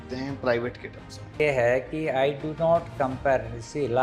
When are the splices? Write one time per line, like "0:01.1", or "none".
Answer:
0:01.4